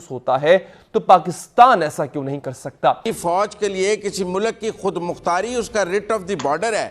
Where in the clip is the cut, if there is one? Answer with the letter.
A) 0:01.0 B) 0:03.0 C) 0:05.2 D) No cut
B